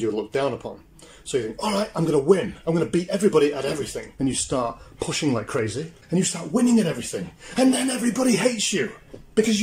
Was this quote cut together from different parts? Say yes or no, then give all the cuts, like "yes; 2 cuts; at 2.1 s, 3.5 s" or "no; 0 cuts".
yes; 2 cuts; at 4.0 s, 5.9 s